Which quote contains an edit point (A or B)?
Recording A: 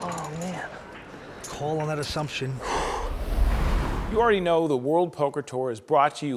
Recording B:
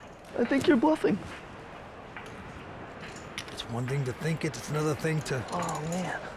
A